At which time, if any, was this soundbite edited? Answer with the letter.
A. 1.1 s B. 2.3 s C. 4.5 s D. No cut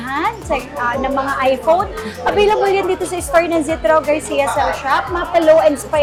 D